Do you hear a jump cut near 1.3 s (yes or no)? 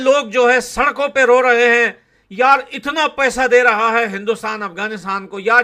no